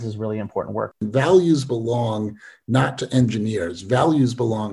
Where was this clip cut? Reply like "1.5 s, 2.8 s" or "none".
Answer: 0.9 s